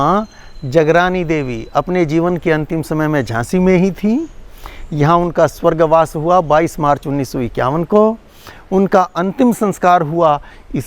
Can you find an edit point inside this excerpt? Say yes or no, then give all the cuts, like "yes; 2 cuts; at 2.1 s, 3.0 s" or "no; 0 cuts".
no; 0 cuts